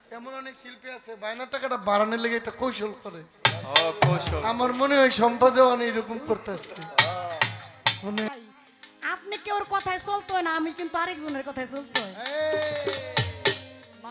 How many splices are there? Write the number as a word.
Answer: one